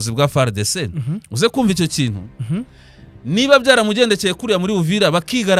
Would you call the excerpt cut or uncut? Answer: uncut